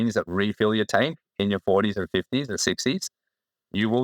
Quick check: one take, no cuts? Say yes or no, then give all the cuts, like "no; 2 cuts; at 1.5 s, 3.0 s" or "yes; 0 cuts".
yes; 0 cuts